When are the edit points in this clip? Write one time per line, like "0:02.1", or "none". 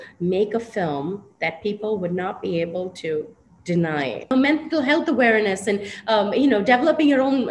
0:04.3